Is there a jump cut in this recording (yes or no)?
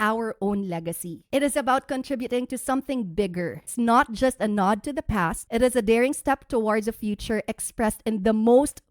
yes